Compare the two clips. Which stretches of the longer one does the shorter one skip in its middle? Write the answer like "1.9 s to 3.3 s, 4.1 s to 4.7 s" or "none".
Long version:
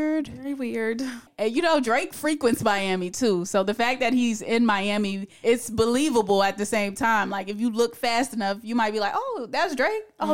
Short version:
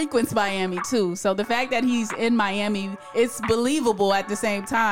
none